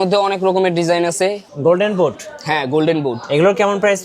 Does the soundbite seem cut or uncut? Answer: cut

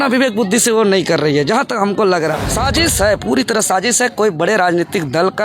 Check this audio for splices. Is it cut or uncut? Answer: cut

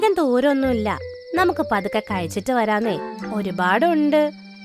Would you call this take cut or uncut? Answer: uncut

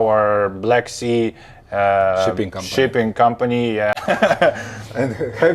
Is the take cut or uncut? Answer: cut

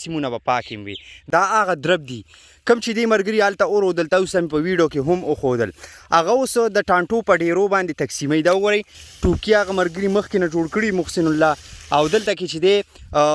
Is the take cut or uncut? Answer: cut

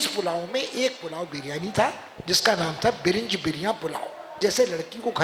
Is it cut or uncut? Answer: cut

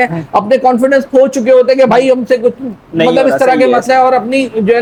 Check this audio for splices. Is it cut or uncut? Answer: uncut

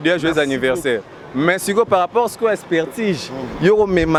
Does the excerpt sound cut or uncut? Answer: uncut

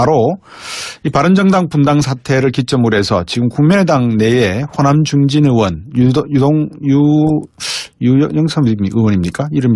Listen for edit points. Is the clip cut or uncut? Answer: uncut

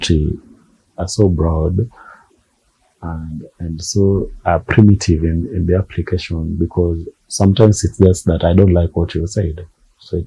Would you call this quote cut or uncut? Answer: uncut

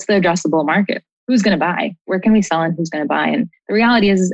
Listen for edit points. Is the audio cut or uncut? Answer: cut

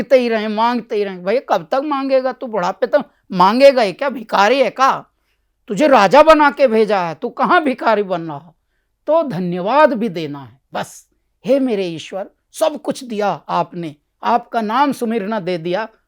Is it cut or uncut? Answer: uncut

